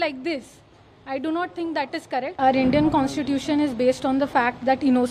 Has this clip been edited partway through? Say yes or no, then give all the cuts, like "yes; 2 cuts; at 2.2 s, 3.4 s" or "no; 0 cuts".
yes; 1 cut; at 2.4 s